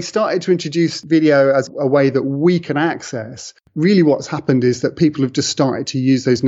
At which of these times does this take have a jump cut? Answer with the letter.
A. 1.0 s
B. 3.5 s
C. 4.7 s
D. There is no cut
A